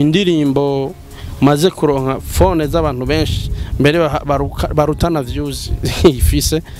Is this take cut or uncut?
uncut